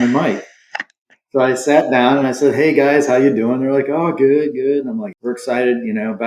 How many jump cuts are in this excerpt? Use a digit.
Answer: 1